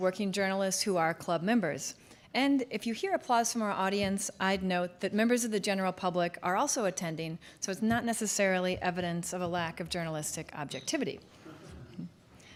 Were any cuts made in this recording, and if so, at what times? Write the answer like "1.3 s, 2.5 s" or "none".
none